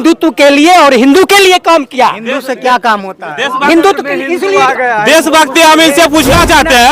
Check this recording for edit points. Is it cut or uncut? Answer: uncut